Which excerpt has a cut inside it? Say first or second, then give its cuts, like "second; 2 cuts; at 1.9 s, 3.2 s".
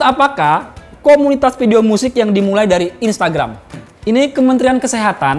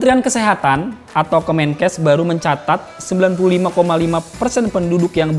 first; 1 cut; at 3.6 s